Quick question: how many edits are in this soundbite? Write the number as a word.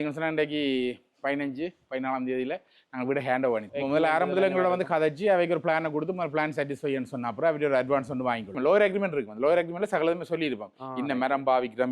two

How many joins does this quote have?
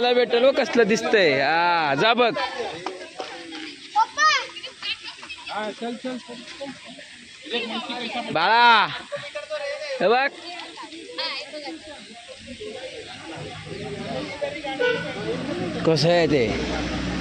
zero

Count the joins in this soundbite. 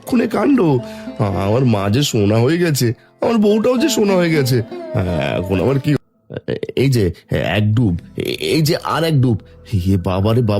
one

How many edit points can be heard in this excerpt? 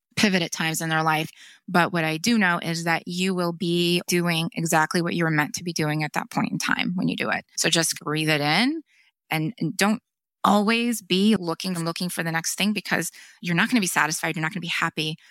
four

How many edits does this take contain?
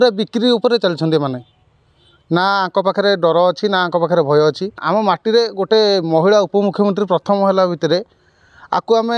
one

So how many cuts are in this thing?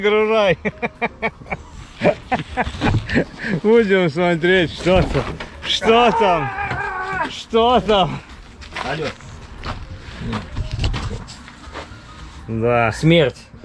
zero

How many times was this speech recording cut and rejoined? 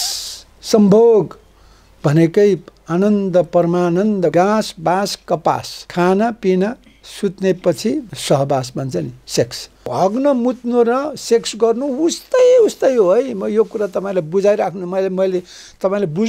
four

